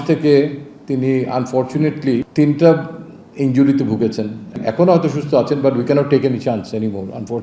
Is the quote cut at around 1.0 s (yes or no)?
no